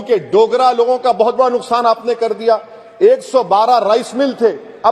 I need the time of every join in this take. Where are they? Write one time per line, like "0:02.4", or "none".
none